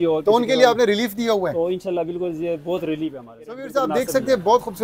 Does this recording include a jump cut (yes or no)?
yes